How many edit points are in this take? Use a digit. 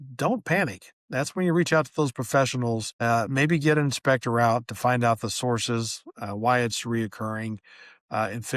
1